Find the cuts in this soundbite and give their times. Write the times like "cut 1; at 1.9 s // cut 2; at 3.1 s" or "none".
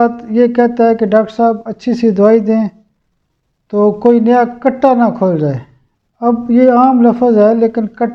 none